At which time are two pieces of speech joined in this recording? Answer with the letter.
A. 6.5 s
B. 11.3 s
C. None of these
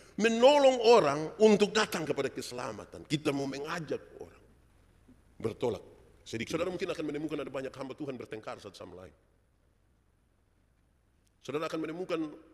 A